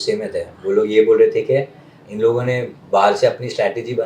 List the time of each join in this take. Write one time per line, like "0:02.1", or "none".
0:02.0